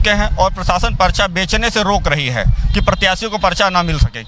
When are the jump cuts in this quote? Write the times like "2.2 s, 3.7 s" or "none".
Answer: none